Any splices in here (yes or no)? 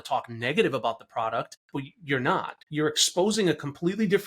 yes